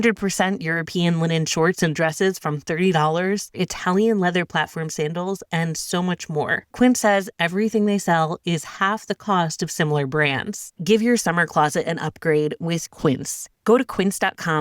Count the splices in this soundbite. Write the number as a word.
three